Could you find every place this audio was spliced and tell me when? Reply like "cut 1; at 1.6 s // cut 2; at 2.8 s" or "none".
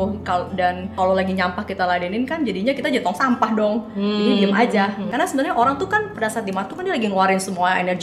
cut 1; at 0.9 s // cut 2; at 5.1 s